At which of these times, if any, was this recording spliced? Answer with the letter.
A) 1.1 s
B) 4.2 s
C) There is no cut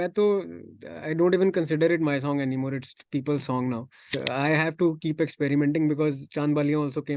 B